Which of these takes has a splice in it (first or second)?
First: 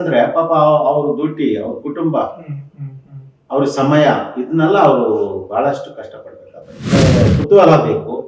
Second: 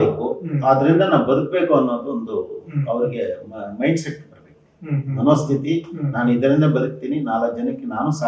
first